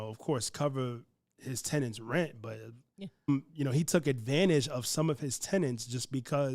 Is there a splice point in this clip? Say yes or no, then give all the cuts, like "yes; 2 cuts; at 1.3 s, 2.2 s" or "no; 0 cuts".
yes; 1 cut; at 3.3 s